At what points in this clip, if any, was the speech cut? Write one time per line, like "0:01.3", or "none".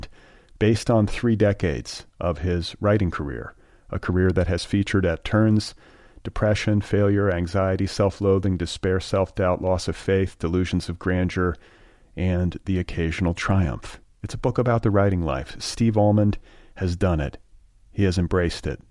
none